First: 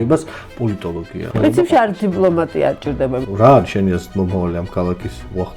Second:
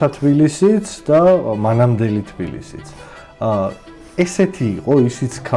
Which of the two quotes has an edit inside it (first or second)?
first